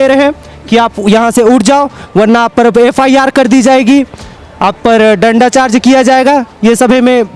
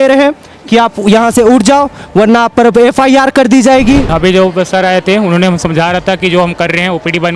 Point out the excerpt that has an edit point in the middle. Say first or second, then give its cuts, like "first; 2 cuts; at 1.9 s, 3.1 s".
second; 1 cut; at 4.1 s